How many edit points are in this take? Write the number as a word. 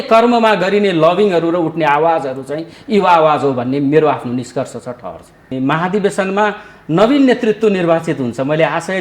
one